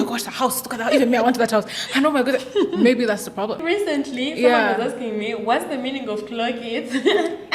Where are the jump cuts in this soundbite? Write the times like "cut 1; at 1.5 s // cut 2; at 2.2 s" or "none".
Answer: cut 1; at 3.6 s